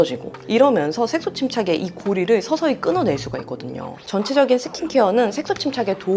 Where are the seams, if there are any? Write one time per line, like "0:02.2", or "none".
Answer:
0:04.0